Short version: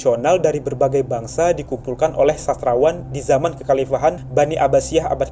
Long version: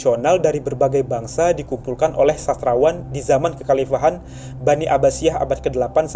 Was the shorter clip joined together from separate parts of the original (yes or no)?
yes